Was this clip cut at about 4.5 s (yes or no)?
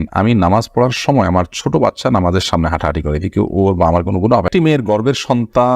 yes